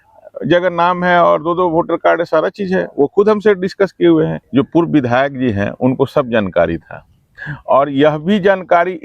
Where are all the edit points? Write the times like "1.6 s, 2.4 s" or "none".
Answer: 4.4 s